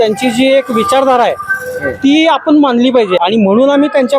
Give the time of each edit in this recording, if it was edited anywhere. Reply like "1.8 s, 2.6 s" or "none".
3.2 s